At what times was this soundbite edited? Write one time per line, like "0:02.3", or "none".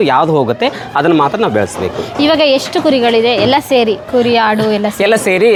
none